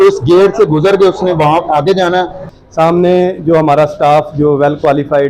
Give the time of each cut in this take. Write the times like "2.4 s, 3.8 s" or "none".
2.4 s